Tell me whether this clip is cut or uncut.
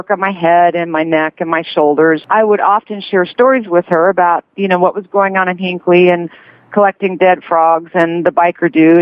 uncut